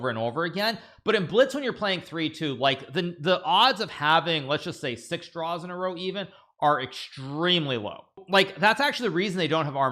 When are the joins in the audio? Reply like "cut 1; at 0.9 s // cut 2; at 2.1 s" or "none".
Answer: cut 1; at 8.2 s